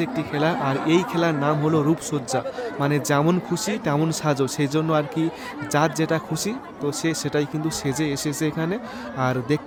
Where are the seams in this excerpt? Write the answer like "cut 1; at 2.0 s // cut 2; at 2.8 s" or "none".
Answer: none

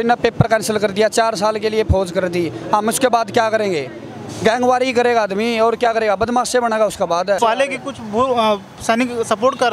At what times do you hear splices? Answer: cut 1; at 7.4 s

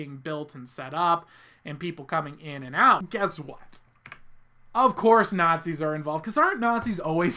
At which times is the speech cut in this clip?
cut 1; at 3.1 s

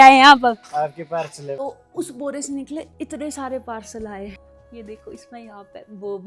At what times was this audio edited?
cut 1; at 1.5 s // cut 2; at 4.4 s

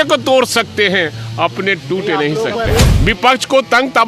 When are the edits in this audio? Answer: cut 1; at 2.8 s

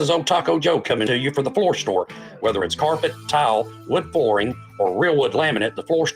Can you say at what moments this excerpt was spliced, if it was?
cut 1; at 1.1 s

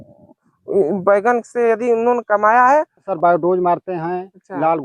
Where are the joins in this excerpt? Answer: cut 1; at 3.1 s

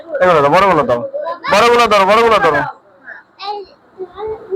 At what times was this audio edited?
none

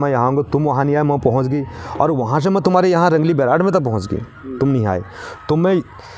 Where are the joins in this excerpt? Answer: none

